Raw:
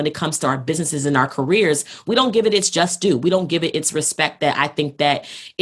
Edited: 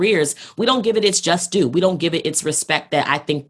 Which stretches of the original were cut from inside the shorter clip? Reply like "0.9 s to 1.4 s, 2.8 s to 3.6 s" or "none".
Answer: none